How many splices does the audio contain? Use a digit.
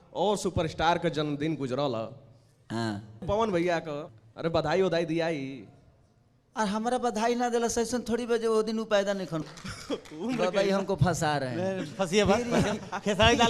3